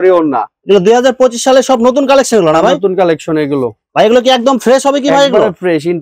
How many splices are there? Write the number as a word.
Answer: one